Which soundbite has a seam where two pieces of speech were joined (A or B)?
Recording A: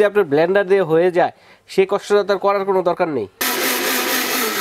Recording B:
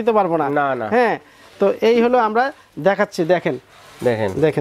A